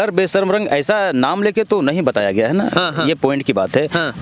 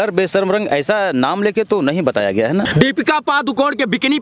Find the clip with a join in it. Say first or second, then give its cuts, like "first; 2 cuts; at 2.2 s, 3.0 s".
second; 1 cut; at 2.7 s